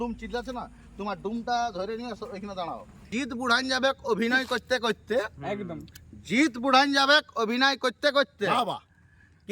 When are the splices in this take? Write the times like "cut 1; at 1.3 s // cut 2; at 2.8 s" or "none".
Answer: cut 1; at 3.0 s